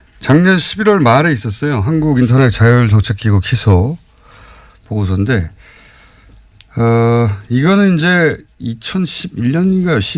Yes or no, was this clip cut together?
yes